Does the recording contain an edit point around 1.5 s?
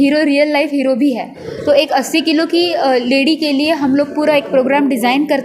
yes; 1 cut; at 1.5 s

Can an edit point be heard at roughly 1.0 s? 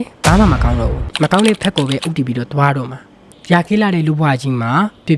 yes; 2 cuts; at 1.0 s, 3.3 s

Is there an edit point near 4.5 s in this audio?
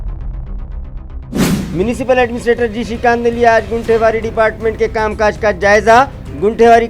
no; 1 cut; at 1.7 s

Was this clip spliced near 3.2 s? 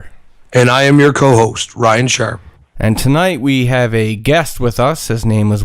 yes; 1 cut; at 3.2 s

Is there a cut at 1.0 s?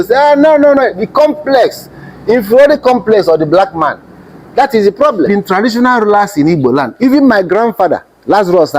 no; 1 cut; at 5.3 s

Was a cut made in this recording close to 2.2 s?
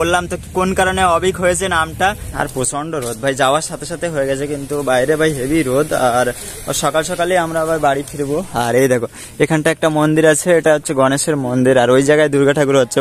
yes; 1 cut; at 2.2 s

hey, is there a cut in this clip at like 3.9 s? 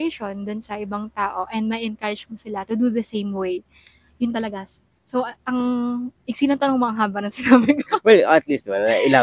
no; 0 cuts

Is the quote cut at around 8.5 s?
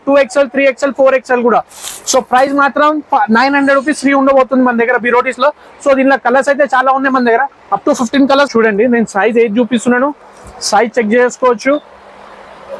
yes; 1 cut; at 8.5 s

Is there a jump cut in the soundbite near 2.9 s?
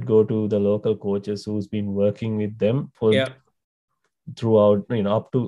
yes; 1 cut; at 2.9 s

